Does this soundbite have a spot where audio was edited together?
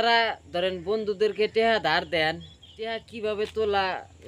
yes; 1 cut; at 3.1 s

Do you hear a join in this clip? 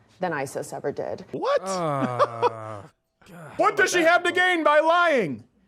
yes; 2 cuts; at 1.3 s, 3.5 s

